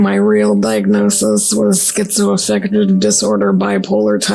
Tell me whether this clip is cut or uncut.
uncut